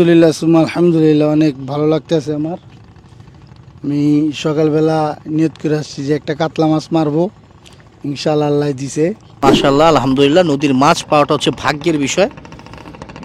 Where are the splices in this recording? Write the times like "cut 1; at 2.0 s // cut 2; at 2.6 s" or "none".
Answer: cut 1; at 9.3 s